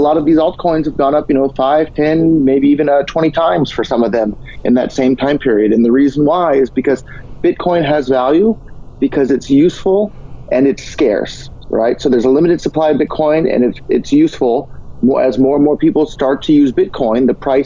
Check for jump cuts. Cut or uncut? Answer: uncut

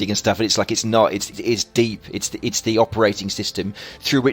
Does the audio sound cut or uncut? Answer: cut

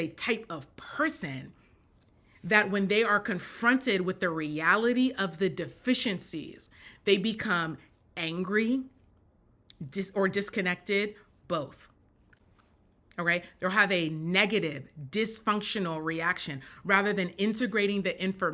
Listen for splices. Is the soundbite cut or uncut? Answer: uncut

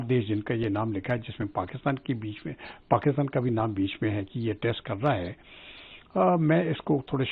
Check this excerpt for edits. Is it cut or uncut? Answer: uncut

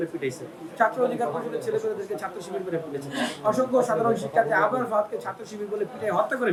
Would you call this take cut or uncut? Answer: uncut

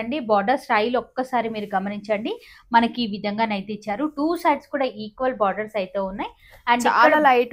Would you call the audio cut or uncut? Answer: uncut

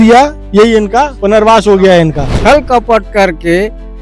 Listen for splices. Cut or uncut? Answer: cut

